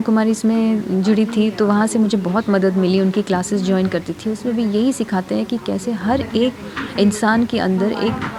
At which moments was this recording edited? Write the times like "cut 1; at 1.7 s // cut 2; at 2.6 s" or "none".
none